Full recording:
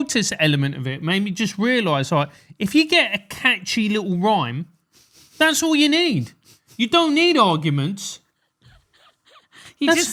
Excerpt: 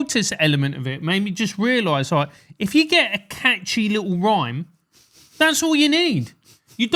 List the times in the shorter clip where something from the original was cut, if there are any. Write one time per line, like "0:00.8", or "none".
none